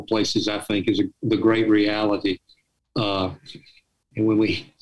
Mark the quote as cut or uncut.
uncut